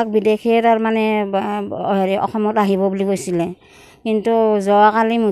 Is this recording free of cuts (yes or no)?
yes